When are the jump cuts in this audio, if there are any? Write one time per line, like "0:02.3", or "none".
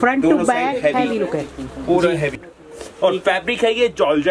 0:02.4

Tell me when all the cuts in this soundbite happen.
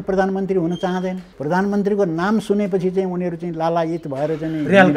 0:01.3

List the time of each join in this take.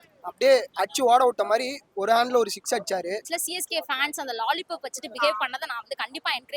0:03.2

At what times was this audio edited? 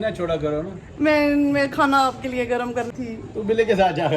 0:02.9

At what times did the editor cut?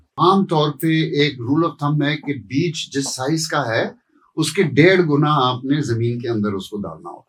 none

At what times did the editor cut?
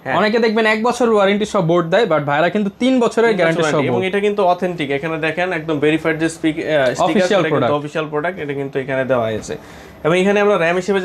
none

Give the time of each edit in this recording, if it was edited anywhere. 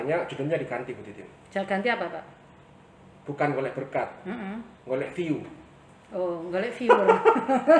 none

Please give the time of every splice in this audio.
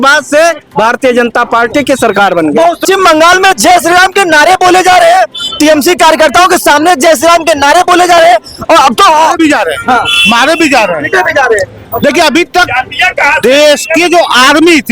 0:02.8

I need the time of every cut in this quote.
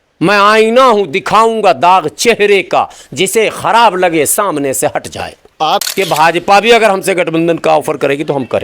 0:05.9

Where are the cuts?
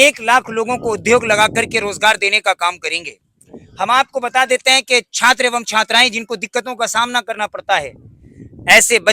none

